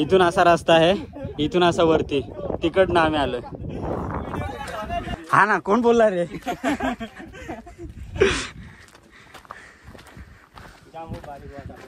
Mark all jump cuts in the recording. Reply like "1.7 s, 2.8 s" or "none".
5.1 s